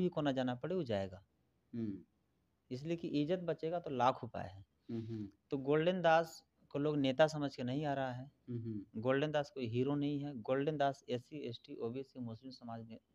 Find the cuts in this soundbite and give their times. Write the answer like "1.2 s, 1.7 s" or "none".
none